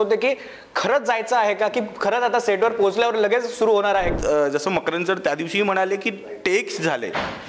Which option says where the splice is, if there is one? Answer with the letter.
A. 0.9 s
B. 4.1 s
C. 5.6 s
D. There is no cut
B